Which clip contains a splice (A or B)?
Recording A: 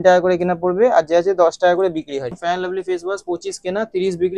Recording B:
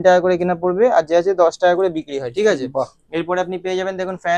A